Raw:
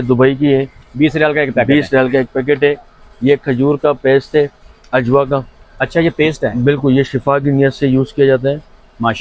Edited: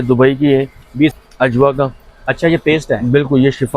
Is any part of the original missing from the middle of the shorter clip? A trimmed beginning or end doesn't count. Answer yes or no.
yes